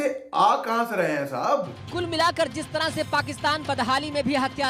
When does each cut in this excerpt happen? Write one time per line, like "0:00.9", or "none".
0:01.8